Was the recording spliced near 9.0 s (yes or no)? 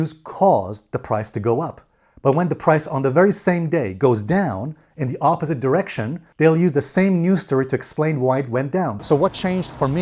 yes